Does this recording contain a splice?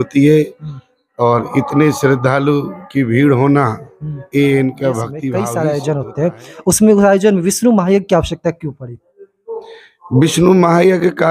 yes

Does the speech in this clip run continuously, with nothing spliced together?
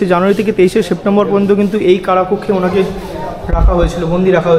yes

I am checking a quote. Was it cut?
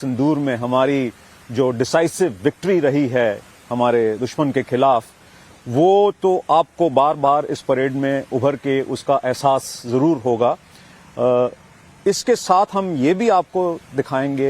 yes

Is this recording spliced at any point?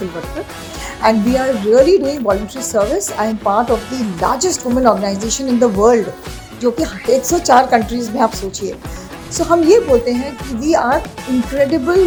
no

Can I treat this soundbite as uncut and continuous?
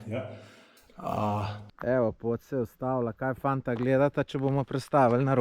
no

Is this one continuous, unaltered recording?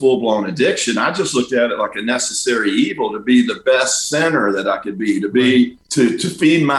no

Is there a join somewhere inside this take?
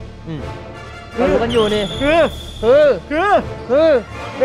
no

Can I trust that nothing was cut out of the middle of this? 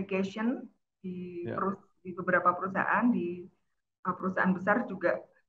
yes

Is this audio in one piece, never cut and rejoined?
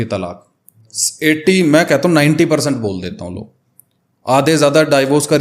yes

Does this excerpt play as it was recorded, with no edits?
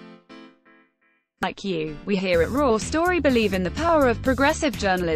no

